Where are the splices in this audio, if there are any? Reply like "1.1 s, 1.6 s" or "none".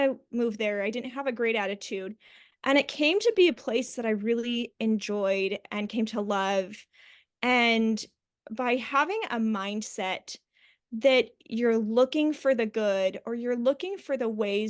none